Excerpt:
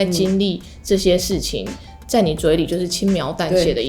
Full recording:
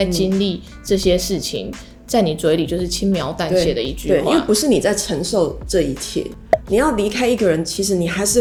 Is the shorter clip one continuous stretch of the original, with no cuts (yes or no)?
yes